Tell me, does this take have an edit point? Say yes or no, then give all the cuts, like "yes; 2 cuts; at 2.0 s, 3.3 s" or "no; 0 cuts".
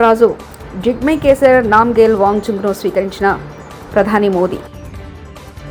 no; 0 cuts